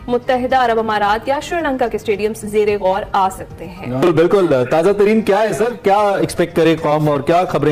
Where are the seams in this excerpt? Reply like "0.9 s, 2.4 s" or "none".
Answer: none